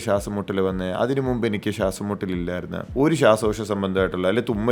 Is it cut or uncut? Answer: cut